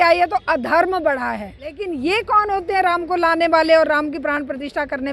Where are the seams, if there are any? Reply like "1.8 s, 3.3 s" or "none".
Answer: 1.9 s